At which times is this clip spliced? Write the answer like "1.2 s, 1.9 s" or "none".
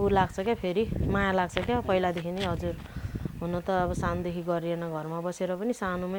none